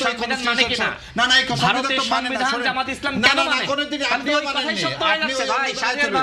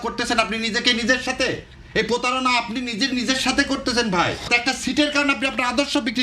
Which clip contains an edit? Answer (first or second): second